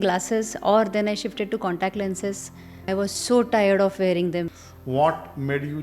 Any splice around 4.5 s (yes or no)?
yes